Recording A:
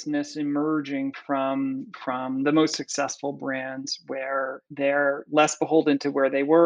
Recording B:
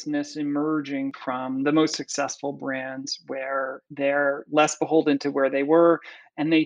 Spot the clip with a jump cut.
B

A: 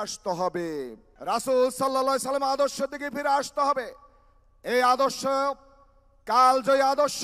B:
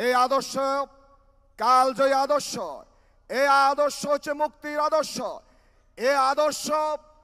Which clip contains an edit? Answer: A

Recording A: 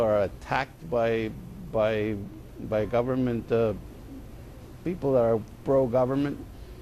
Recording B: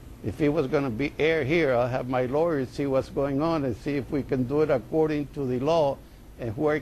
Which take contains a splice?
A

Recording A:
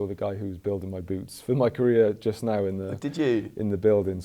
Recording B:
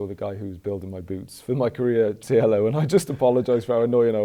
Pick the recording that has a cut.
B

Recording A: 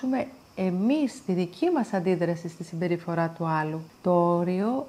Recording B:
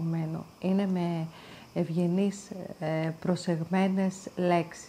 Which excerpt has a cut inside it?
A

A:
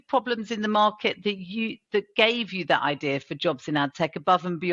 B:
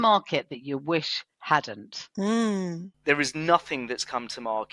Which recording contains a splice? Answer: B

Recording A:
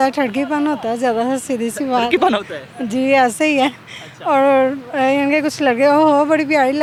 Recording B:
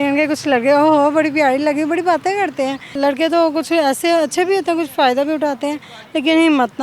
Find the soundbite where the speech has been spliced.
B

